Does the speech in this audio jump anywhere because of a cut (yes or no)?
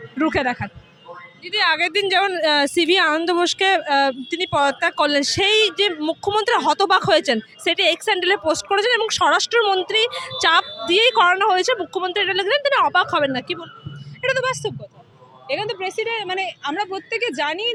no